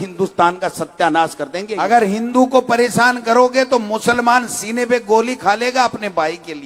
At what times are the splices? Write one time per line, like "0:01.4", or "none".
0:01.7